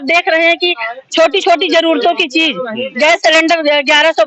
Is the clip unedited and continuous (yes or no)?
yes